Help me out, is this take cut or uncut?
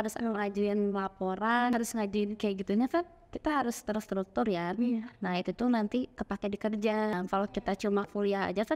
cut